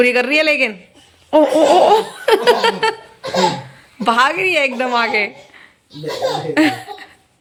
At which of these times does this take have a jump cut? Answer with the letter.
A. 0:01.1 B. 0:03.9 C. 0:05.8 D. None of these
D